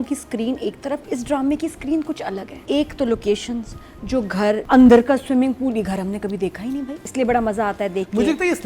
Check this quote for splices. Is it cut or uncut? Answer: cut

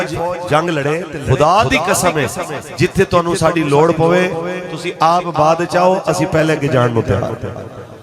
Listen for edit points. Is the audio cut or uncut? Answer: cut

